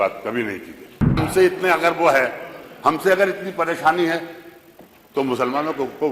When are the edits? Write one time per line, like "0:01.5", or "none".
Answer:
0:01.2